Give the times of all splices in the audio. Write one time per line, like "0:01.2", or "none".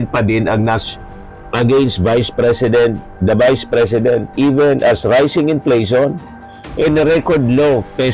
0:00.9